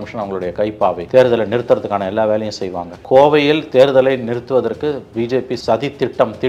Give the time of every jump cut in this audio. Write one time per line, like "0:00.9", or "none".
0:01.0
0:02.9